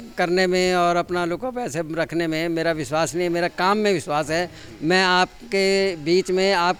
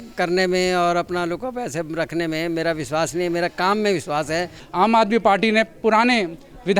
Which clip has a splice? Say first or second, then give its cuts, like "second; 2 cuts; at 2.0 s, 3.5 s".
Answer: second; 1 cut; at 4.6 s